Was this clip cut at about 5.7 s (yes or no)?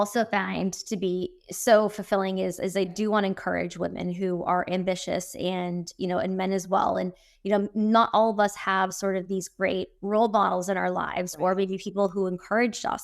no